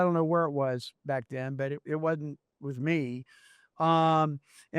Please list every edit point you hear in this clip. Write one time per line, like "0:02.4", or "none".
none